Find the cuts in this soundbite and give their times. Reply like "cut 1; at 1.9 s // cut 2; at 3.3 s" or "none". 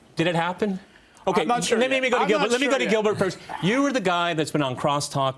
cut 1; at 3.4 s